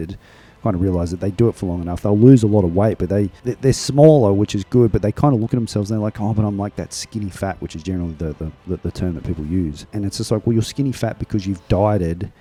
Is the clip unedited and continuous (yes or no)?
yes